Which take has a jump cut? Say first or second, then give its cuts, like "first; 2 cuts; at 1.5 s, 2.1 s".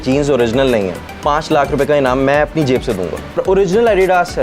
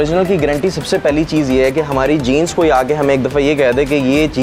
first; 2 cuts; at 1.0 s, 3.4 s